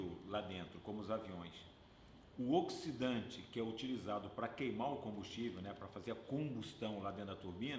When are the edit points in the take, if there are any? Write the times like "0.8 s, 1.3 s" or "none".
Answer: none